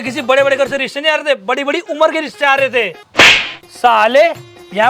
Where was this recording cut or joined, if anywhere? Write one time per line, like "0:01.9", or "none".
0:03.0